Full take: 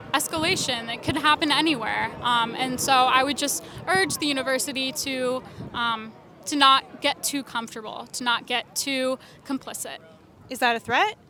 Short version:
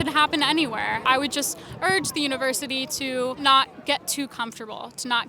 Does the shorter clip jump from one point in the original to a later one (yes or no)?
yes